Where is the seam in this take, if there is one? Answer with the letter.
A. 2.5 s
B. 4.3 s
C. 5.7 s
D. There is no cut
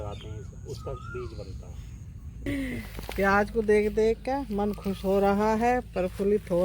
A